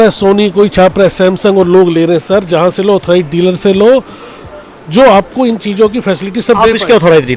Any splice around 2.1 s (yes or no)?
no